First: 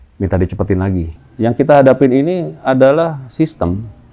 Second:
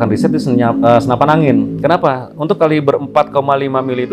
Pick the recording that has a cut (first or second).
first